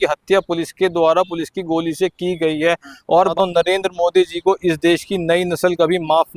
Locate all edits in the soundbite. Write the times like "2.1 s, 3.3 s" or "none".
3.3 s

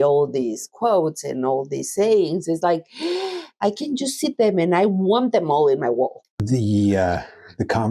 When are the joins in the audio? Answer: 6.3 s

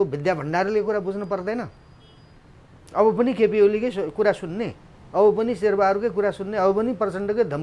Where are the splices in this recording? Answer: none

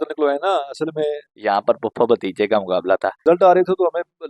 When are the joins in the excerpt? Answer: 1.3 s, 3.2 s

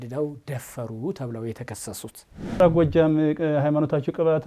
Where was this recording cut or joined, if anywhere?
2.5 s

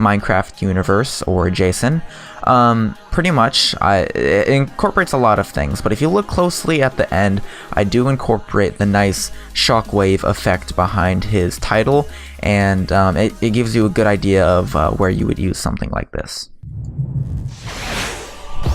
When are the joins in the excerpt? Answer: 8.8 s

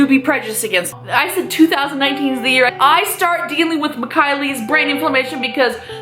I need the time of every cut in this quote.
0.9 s, 2.7 s

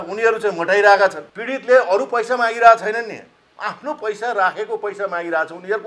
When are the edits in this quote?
1.3 s

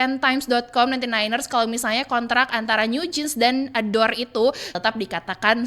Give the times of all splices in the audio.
4.8 s

